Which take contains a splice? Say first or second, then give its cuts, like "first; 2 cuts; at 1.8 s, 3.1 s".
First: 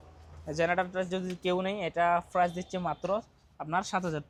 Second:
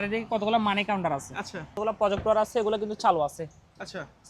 second; 1 cut; at 1.8 s